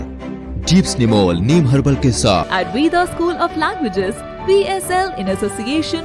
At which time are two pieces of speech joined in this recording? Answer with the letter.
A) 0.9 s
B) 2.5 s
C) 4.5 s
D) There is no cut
B